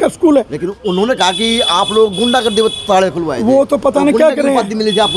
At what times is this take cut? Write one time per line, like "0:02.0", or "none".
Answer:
none